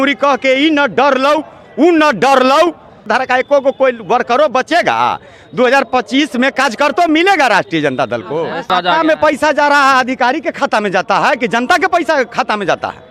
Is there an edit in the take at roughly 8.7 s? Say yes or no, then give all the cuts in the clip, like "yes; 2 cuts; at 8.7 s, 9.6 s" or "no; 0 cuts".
yes; 2 cuts; at 3.0 s, 8.7 s